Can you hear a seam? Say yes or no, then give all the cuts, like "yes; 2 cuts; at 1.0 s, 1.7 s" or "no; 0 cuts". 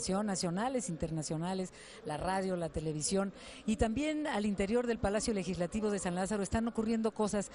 no; 0 cuts